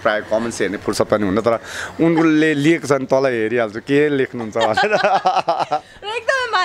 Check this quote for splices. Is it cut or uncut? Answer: uncut